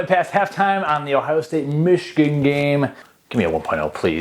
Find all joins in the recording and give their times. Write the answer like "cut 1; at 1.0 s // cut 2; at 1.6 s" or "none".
cut 1; at 3.3 s

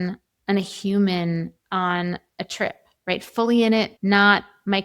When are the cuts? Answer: cut 1; at 1.6 s // cut 2; at 3.9 s

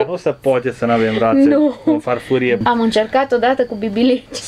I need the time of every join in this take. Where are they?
cut 1; at 2.6 s

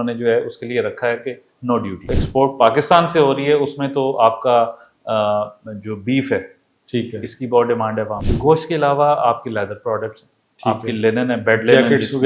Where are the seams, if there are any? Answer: cut 1; at 2.1 s // cut 2; at 8.3 s

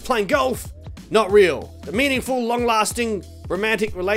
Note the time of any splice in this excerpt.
cut 1; at 1.8 s

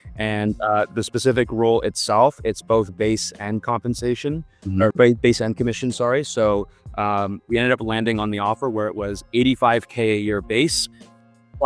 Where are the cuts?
cut 1; at 7.4 s

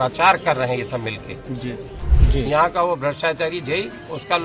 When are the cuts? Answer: cut 1; at 2.1 s

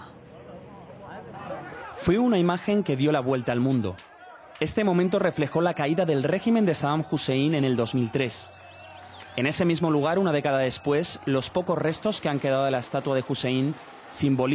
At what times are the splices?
cut 1; at 10.0 s

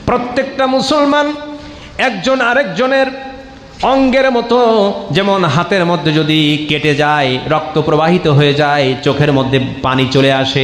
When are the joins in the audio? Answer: none

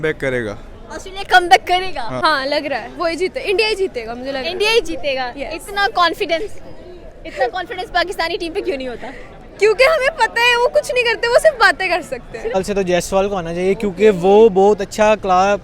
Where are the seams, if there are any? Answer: cut 1; at 2.1 s // cut 2; at 12.5 s

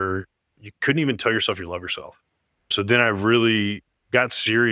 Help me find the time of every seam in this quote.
none

